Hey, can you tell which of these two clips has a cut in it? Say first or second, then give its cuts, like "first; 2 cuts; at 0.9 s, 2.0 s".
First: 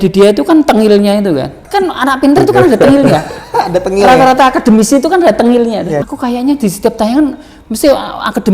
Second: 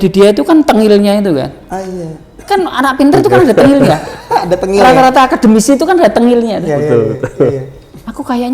first; 2 cuts; at 1.6 s, 6.0 s